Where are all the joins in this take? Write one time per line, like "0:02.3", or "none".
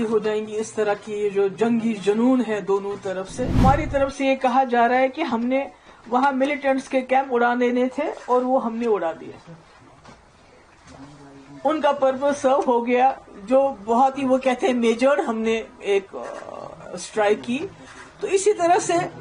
0:03.6

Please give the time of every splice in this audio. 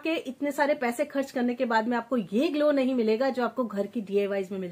none

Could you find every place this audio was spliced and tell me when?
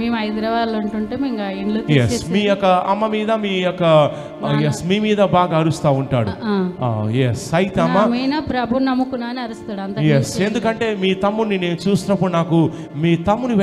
none

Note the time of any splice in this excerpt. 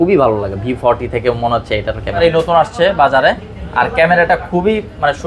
0:02.2

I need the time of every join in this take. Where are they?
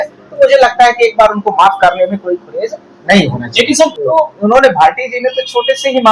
0:04.0

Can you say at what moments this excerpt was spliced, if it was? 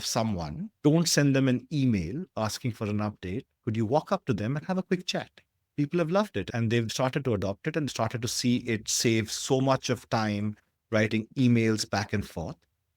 0:05.6

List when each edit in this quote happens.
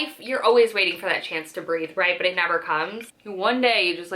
0:03.0

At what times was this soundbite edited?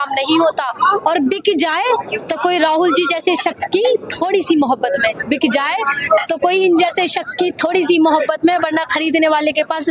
none

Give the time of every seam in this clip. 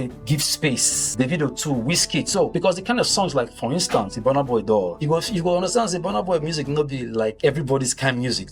0:01.0
0:02.5
0:05.0
0:07.4

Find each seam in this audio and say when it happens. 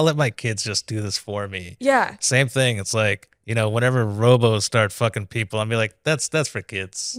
none

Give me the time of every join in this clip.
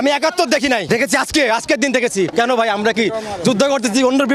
0:00.8
0:02.3

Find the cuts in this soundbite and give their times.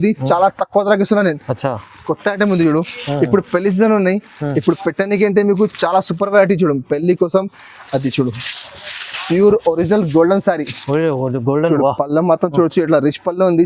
0:01.9

